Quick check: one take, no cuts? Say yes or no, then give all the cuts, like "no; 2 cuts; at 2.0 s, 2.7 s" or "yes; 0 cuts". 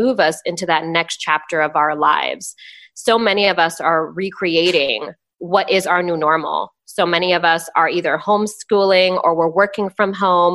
yes; 0 cuts